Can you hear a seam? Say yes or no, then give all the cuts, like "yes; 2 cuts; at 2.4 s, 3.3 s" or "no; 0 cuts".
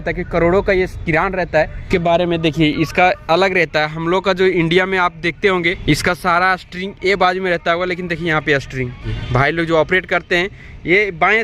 yes; 3 cuts; at 1.8 s, 5.8 s, 9.1 s